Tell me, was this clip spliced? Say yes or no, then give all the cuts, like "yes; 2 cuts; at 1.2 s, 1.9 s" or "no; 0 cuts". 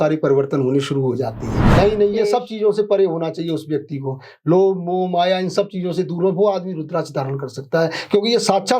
yes; 1 cut; at 1.6 s